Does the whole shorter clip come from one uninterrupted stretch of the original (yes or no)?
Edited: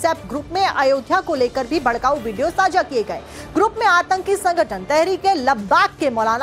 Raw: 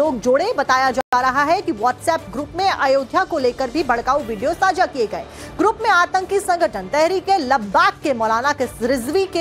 yes